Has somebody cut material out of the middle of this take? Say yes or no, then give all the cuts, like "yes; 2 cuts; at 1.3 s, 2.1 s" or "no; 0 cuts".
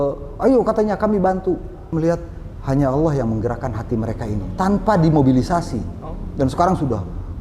yes; 1 cut; at 1.8 s